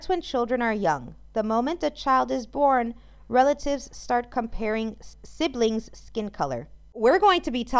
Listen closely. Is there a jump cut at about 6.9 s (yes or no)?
yes